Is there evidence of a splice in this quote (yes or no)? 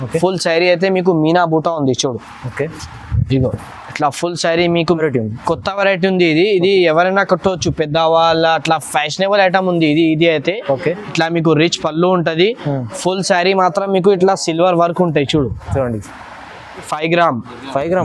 yes